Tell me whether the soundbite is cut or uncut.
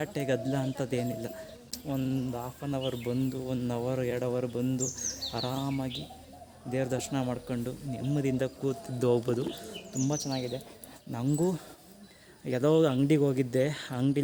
uncut